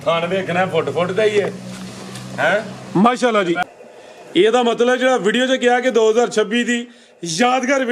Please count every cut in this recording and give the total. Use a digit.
1